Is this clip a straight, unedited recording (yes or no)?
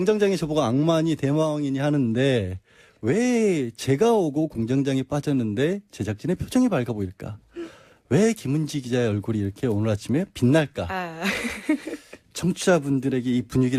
no